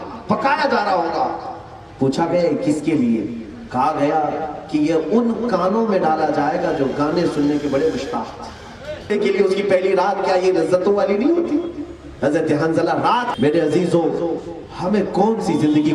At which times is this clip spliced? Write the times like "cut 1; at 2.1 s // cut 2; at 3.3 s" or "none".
cut 1; at 9.1 s // cut 2; at 13.3 s